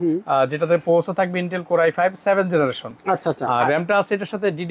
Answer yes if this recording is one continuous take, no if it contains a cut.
yes